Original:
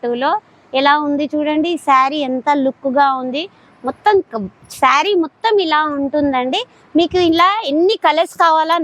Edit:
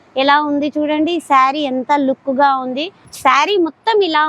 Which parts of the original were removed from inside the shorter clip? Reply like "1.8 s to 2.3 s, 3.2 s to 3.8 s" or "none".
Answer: 3.6 s to 4.6 s